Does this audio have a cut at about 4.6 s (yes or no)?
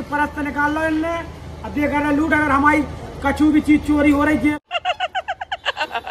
yes